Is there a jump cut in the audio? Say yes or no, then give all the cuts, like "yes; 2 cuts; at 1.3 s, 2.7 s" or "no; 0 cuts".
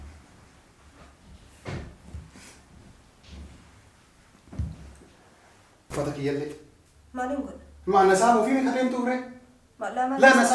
yes; 1 cut; at 5.8 s